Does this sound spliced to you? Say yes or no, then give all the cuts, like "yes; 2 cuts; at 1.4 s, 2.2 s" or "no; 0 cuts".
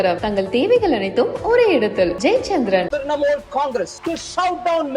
yes; 2 cuts; at 2.9 s, 4.0 s